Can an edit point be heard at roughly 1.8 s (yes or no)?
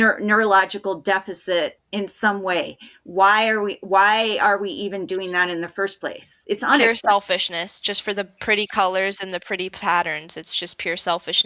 yes